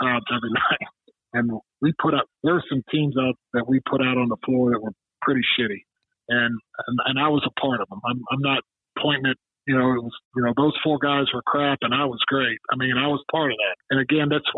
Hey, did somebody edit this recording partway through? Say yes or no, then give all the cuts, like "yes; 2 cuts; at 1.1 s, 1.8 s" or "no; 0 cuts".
yes; 2 cuts; at 2.3 s, 3.4 s